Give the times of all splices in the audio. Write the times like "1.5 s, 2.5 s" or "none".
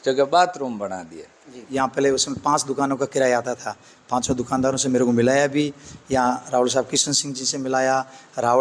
1.5 s